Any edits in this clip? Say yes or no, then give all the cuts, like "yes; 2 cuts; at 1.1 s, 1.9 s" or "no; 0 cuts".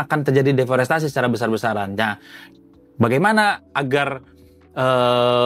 no; 0 cuts